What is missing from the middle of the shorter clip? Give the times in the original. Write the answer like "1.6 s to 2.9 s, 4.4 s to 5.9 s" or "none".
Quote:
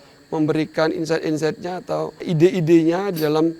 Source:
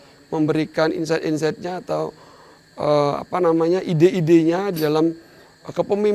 2.3 s to 3.9 s